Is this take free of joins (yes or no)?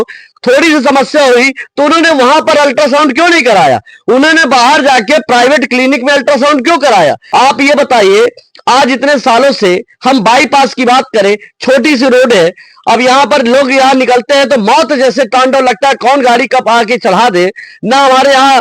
no